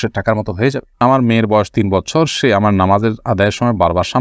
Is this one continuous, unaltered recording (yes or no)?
no